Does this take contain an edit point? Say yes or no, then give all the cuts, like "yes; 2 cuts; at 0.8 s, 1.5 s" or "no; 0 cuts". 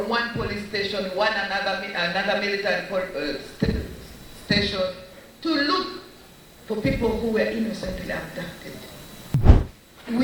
yes; 1 cut; at 9.3 s